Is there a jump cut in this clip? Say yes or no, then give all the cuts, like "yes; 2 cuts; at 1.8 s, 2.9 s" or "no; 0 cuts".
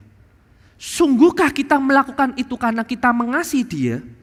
no; 0 cuts